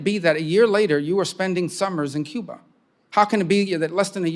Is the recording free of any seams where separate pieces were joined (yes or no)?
yes